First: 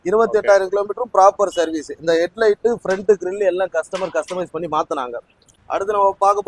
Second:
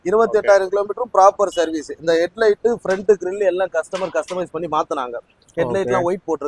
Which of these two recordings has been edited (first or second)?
first